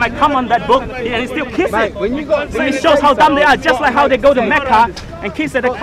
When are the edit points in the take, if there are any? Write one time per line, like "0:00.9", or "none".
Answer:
none